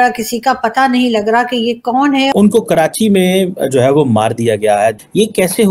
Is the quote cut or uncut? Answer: cut